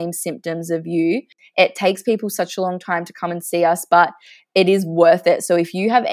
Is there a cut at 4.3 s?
no; 1 cut; at 1.4 s

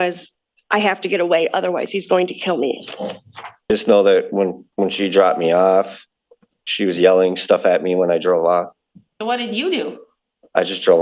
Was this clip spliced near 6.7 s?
no; 1 cut; at 3.7 s

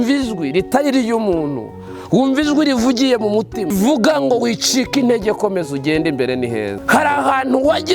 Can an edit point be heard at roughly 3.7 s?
yes; 2 cuts; at 3.7 s, 6.8 s

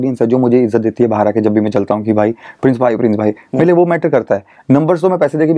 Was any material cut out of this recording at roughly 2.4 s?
no; 0 cuts

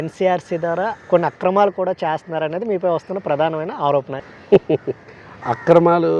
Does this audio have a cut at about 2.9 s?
no; 1 cut; at 4.1 s

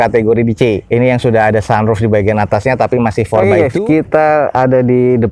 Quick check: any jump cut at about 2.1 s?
no; 1 cut; at 3.4 s

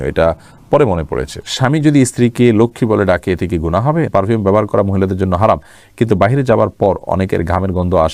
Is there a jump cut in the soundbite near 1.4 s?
yes; 2 cuts; at 1.4 s, 4.1 s

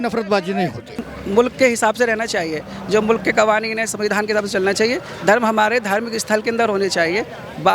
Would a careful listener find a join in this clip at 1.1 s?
yes; 1 cut; at 1.1 s

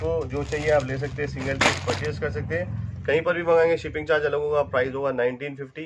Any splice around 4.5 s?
no; 0 cuts

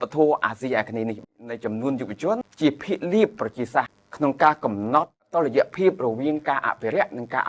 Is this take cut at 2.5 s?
yes; 4 cuts; at 1.4 s, 2.5 s, 4.0 s, 5.3 s

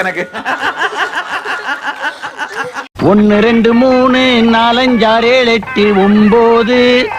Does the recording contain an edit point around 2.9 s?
yes; 1 cut; at 2.9 s

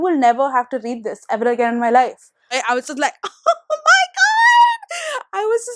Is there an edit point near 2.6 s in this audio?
yes; 1 cut; at 2.6 s

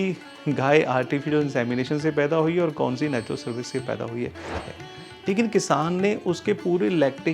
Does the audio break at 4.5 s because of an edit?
yes; 1 cut; at 4.5 s

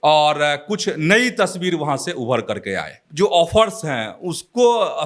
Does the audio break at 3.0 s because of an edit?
yes; 1 cut; at 3.0 s

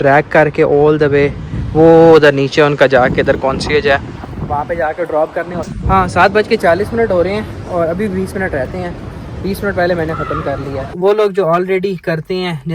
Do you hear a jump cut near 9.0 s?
no; 2 cuts; at 5.7 s, 10.9 s

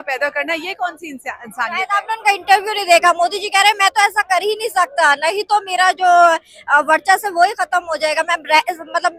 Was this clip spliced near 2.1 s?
no; 0 cuts

